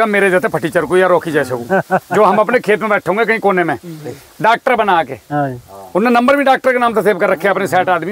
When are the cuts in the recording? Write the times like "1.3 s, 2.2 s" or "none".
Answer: none